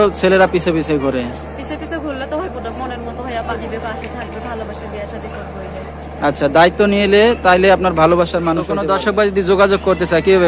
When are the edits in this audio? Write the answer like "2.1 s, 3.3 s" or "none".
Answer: 3.5 s, 8.7 s